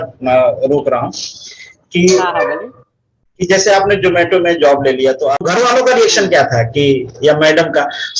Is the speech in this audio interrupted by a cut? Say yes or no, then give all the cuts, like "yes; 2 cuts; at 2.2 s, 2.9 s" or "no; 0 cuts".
yes; 1 cut; at 5.4 s